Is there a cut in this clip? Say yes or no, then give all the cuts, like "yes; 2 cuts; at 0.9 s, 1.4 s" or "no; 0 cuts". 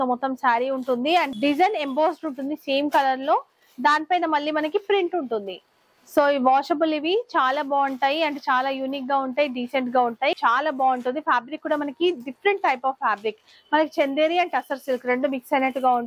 yes; 2 cuts; at 1.3 s, 10.4 s